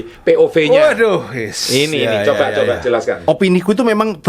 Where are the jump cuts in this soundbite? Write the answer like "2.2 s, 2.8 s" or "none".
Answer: 3.2 s